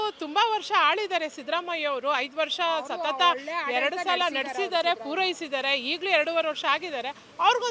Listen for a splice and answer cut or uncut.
uncut